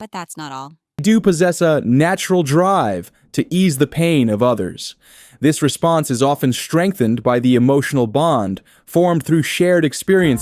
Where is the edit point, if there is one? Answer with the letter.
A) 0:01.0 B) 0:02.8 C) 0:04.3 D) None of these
A